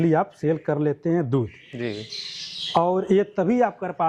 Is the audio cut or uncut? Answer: uncut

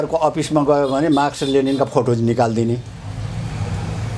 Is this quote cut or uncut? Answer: uncut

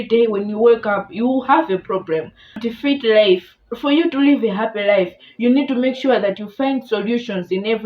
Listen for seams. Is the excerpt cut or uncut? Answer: cut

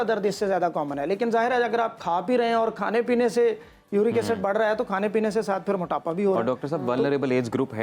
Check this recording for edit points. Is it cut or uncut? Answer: uncut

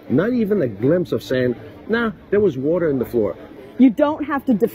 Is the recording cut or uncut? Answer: cut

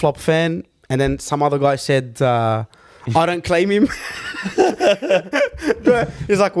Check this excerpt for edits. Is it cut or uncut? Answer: uncut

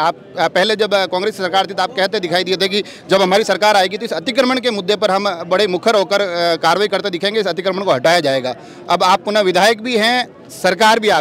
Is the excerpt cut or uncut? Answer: uncut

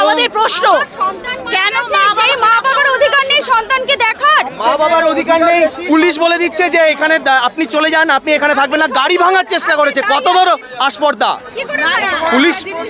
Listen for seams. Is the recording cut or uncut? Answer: uncut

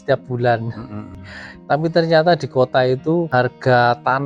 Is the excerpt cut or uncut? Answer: cut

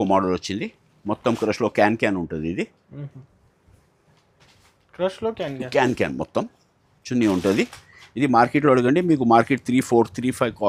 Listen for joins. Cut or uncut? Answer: uncut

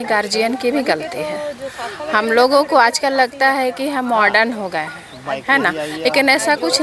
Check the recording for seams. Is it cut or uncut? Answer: uncut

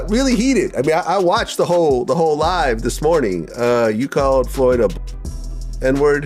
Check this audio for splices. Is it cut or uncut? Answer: uncut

